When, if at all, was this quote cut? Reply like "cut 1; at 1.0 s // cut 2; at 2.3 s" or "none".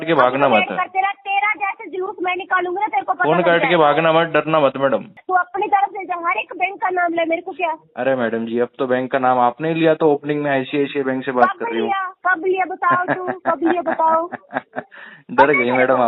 cut 1; at 5.1 s